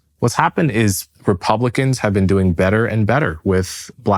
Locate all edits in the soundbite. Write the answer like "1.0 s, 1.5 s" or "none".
1.1 s